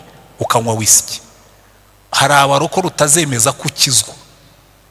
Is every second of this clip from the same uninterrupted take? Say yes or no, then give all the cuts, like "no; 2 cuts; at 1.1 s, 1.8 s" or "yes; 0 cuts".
yes; 0 cuts